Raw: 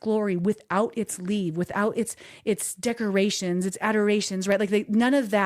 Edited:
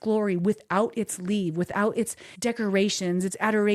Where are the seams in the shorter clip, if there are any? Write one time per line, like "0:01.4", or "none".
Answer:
0:02.3